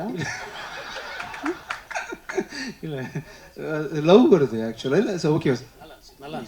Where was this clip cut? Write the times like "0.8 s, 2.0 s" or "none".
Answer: none

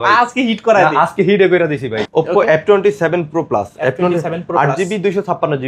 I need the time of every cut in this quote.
2.0 s

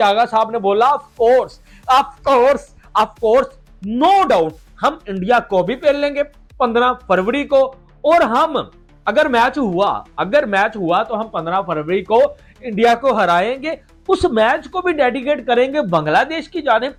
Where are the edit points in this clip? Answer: none

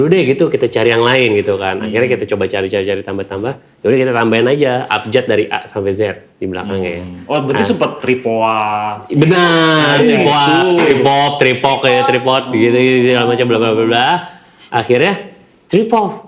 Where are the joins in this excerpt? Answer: none

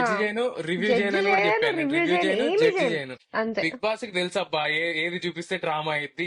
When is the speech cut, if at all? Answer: 3.2 s

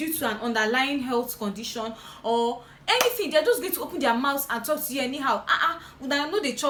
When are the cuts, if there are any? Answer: none

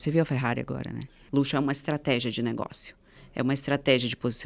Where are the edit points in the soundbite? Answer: 1.2 s

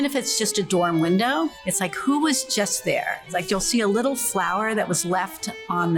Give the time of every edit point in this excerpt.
1.6 s, 3.2 s

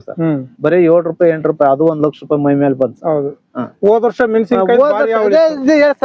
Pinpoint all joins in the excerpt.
none

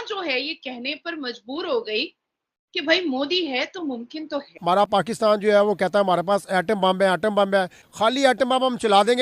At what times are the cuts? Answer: 4.5 s, 7.8 s

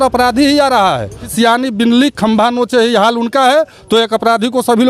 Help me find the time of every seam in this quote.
1.2 s

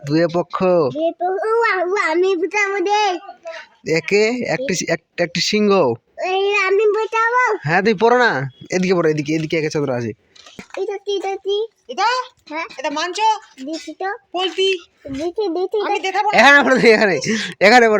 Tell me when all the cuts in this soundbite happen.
10.7 s

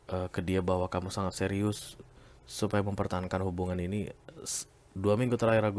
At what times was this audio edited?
none

